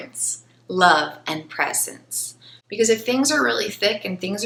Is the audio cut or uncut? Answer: uncut